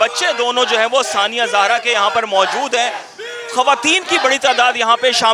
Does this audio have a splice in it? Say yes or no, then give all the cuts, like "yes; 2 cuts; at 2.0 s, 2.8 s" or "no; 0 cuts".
no; 0 cuts